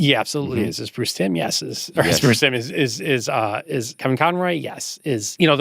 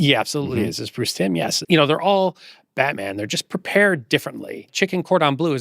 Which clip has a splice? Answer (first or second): second